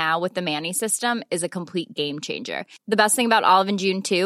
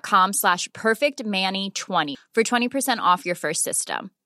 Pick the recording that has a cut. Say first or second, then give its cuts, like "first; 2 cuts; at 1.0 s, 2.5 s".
second; 1 cut; at 2.1 s